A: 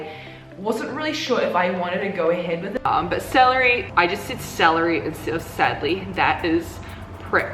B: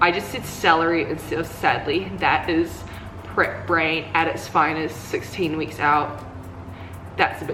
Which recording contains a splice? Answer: A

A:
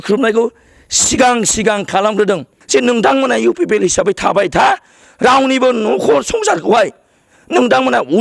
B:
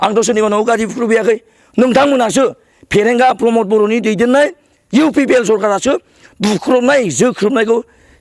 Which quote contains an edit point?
A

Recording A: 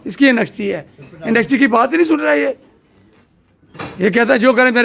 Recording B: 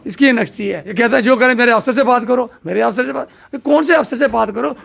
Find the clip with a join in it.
B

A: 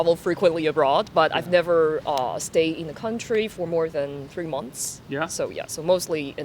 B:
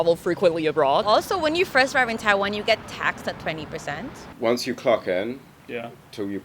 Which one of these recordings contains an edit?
B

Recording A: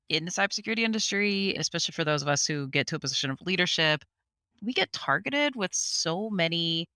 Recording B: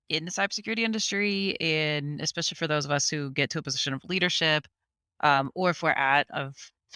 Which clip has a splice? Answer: A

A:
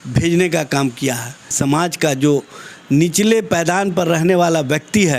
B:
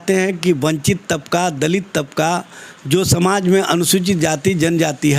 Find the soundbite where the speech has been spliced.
A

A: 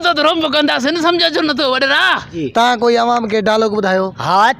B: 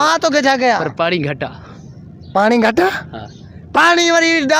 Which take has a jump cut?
A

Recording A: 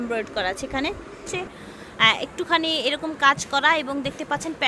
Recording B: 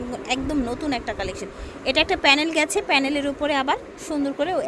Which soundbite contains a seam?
A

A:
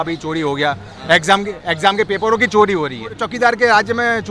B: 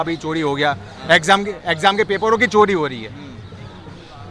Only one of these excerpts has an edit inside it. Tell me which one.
A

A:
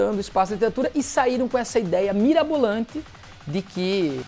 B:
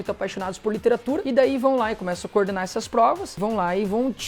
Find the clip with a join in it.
B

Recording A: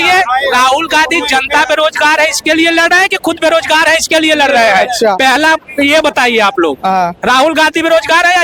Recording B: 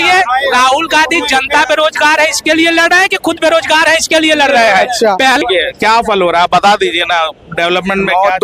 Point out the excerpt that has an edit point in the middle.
B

